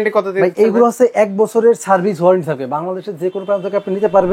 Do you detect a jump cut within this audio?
no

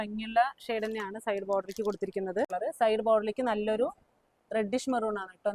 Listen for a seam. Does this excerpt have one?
yes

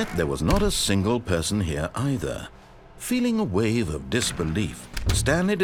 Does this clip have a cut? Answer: no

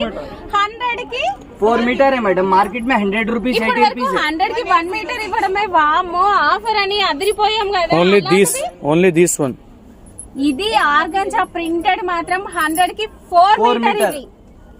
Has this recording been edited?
no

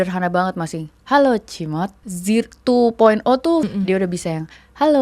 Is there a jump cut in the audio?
yes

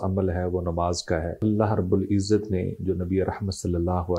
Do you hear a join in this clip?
yes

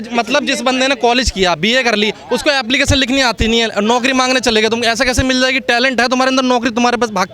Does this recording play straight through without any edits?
yes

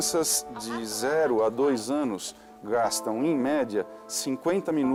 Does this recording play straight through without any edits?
yes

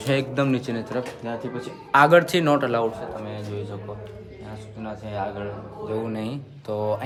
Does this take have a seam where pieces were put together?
no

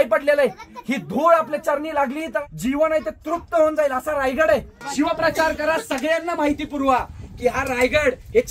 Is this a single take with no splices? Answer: no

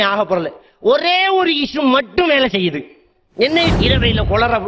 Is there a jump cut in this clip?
yes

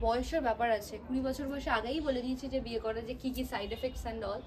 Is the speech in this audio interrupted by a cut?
no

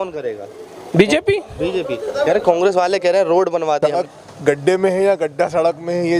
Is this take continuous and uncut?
no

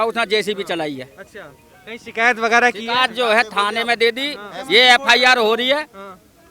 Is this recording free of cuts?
yes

